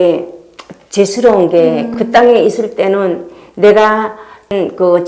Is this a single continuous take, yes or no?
yes